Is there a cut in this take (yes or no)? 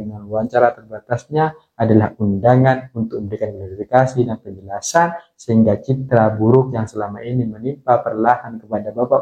no